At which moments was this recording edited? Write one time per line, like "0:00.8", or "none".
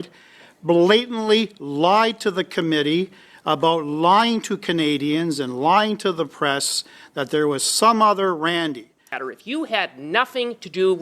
0:09.2

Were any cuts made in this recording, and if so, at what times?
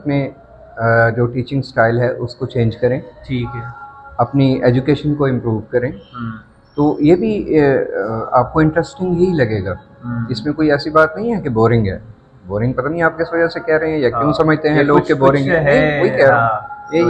none

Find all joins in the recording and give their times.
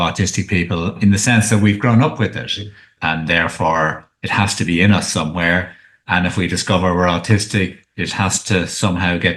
0:01.0
0:02.9

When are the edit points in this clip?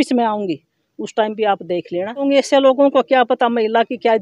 0:02.2

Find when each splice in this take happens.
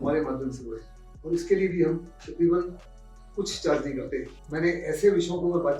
0:04.4

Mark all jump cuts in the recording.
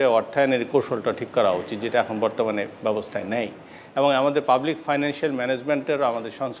none

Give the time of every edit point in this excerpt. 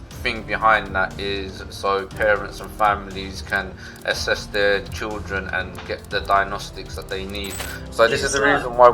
0:07.8

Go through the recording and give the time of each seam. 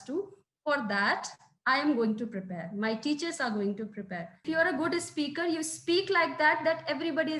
0:04.3

